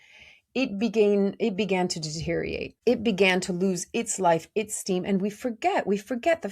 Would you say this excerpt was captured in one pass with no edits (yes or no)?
no